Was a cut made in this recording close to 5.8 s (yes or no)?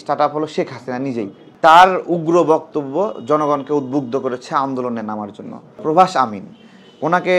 yes